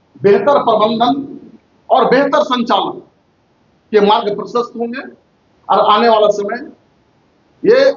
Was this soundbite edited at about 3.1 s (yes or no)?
no